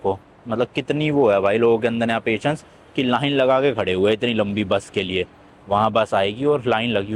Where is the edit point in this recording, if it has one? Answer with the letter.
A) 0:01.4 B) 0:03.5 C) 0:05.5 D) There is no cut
D